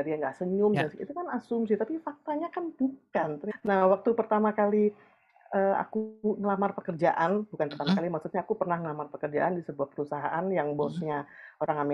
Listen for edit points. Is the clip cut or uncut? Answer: cut